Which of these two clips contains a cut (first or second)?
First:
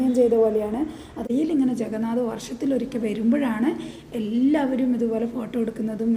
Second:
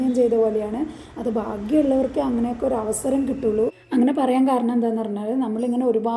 first